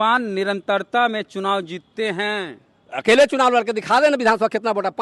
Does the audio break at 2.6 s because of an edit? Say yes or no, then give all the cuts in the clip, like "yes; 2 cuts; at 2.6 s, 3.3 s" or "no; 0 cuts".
no; 0 cuts